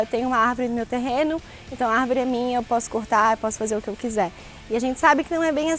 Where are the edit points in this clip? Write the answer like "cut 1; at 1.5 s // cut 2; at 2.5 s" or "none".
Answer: none